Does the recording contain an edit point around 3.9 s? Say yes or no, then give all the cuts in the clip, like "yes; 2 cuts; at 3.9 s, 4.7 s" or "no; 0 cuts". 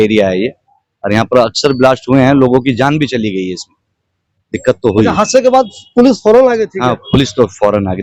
no; 0 cuts